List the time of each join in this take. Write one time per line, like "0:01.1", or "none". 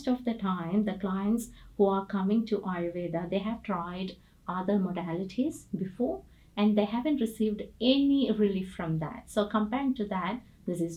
none

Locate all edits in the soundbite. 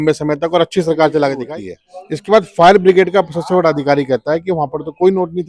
0:01.5

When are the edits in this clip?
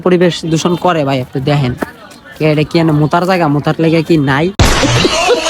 none

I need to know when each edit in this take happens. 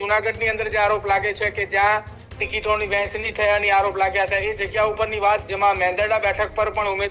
none

